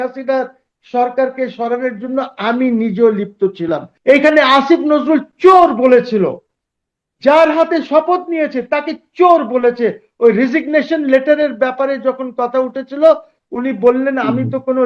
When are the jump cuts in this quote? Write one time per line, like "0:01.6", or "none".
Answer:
0:03.9

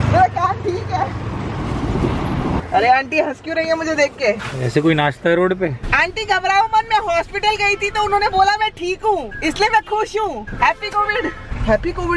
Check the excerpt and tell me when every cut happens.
0:02.6
0:05.8
0:09.3

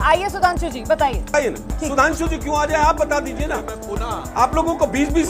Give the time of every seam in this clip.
0:01.3

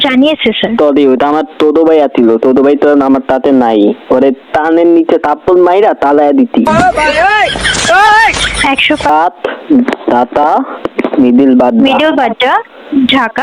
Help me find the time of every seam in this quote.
0:09.1

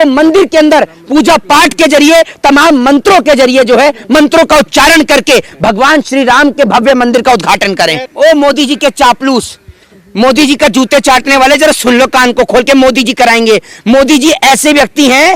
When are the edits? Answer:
0:08.1

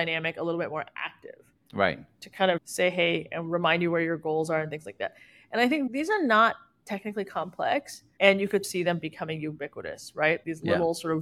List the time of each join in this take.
0:02.6
0:05.9
0:08.7
0:10.4

